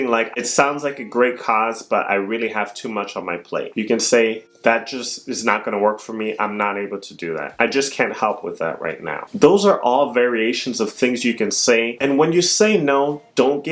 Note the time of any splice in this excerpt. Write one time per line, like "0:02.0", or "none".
0:03.7
0:07.5
0:11.9

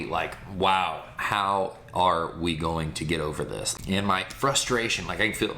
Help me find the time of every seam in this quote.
0:03.6

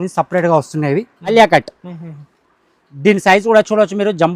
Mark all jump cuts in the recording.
0:01.3

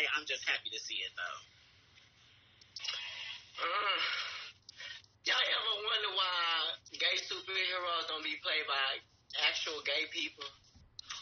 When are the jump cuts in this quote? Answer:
none

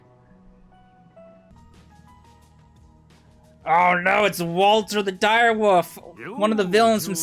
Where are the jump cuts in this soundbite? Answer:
0:01.5

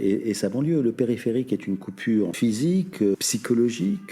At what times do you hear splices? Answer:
0:02.3
0:03.1

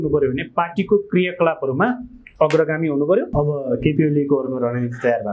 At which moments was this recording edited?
0:03.3

